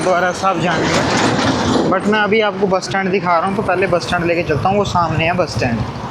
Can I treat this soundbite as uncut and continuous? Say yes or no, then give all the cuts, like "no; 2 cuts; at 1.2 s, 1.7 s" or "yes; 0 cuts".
yes; 0 cuts